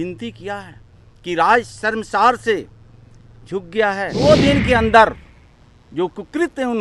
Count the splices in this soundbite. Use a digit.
1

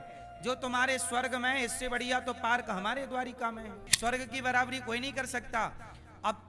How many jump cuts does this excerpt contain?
1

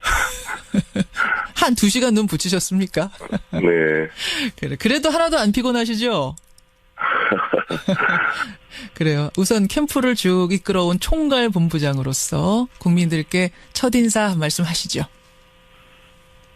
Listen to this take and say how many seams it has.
1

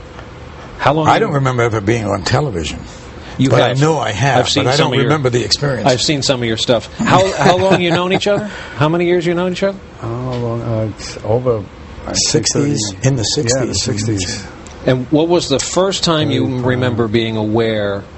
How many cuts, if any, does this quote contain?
1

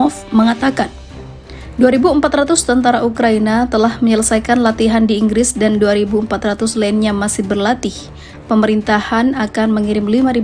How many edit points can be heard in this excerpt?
0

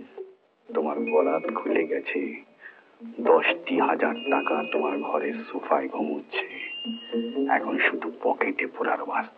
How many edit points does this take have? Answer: 0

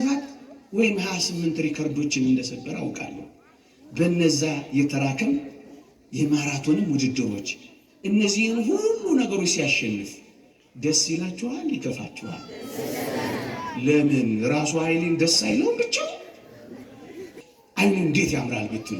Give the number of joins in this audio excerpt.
1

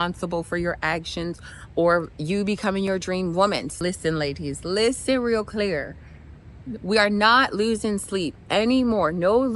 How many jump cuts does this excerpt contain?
1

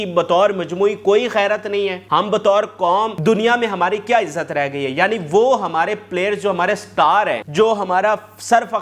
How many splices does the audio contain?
3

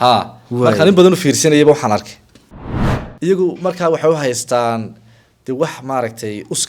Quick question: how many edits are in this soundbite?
1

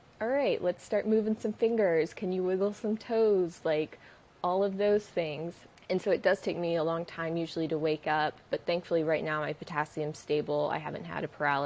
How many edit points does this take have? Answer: 0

